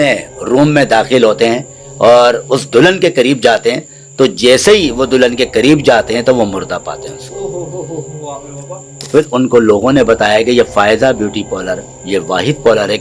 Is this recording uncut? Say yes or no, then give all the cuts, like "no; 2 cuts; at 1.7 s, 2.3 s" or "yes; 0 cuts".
no; 1 cut; at 9.1 s